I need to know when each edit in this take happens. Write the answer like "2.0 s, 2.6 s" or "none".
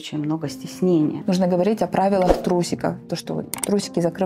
1.2 s